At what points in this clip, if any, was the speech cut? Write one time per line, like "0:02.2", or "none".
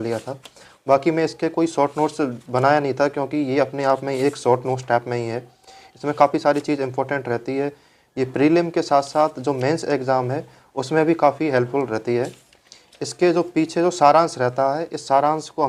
none